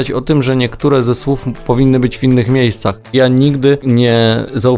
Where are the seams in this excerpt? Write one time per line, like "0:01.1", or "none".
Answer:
0:03.1
0:03.8